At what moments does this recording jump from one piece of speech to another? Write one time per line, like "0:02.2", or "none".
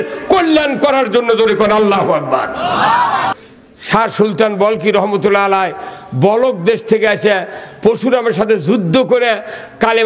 0:03.3